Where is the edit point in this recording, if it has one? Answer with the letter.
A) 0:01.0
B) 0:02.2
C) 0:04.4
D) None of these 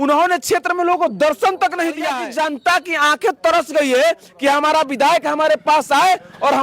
B